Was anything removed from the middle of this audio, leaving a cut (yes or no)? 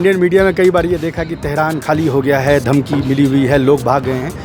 no